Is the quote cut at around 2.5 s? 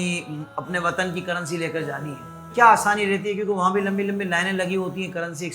yes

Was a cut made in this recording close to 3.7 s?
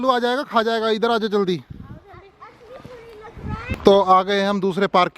yes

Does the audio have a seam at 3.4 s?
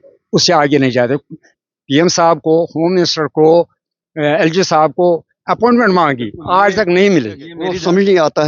no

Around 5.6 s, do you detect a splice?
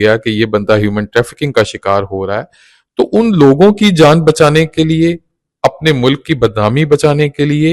no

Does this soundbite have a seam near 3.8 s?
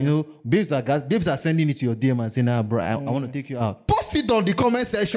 yes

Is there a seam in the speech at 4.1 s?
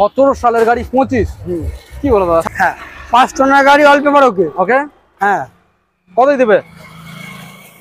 no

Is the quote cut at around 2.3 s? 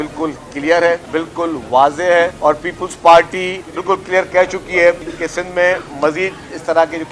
yes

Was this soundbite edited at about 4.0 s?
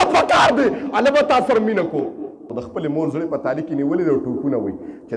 no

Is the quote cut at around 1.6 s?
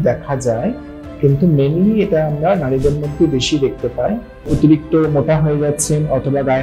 no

